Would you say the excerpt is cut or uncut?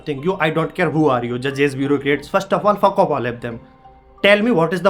uncut